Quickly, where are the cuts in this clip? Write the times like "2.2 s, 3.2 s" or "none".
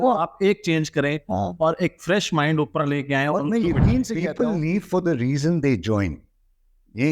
4.2 s